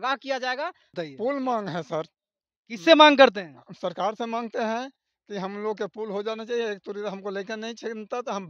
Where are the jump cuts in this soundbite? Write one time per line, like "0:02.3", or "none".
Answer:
0:01.0